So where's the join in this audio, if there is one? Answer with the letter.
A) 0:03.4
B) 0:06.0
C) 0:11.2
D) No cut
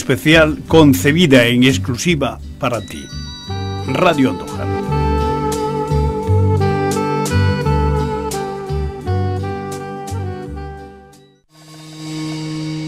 C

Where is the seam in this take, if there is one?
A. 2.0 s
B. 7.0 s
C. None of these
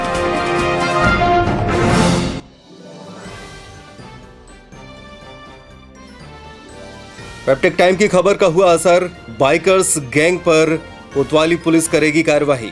B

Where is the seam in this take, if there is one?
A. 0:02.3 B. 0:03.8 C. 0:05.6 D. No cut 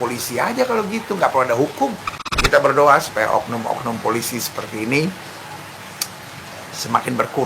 A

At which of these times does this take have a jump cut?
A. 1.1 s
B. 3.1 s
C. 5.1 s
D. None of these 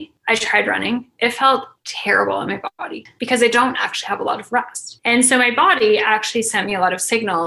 B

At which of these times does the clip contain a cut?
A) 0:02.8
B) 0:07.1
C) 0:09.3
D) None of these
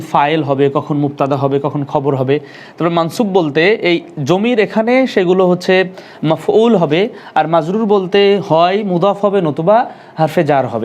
D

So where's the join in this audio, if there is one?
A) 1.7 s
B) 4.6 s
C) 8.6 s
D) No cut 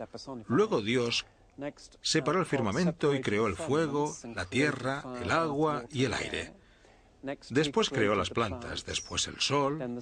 D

